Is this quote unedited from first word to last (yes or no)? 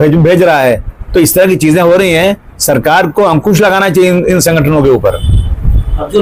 yes